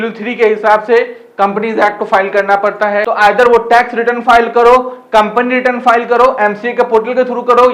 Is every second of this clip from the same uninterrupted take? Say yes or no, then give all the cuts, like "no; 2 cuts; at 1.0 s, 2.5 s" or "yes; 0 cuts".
no; 1 cut; at 3.0 s